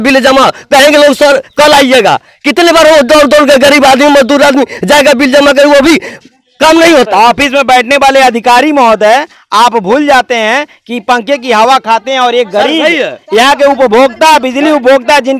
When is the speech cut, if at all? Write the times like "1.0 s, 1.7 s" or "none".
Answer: 7.1 s

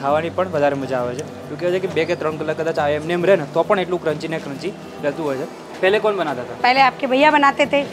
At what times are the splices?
5.6 s

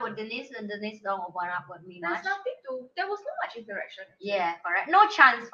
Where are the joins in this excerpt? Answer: none

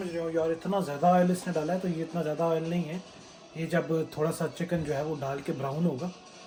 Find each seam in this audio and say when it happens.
none

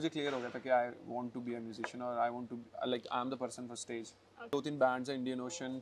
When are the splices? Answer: 4.5 s

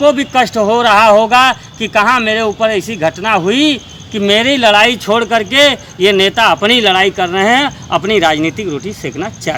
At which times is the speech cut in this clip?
none

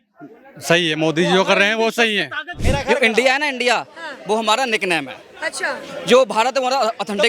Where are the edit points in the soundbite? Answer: 2.6 s

